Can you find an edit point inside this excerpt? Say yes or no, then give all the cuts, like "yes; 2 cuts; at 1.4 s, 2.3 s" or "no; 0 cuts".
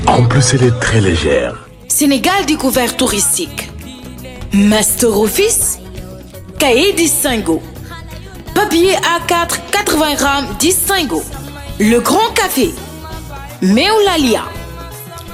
yes; 1 cut; at 1.9 s